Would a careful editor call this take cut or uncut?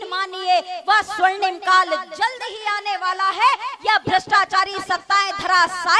uncut